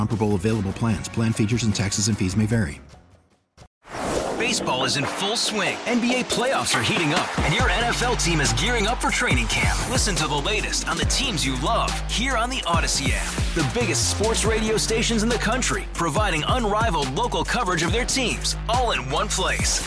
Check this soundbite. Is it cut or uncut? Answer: cut